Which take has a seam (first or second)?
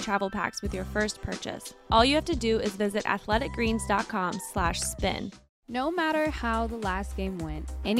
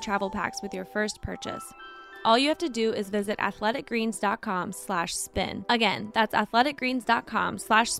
first